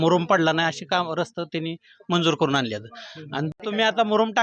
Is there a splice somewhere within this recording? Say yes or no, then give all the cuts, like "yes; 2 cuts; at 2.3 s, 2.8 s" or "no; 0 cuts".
yes; 1 cut; at 3.5 s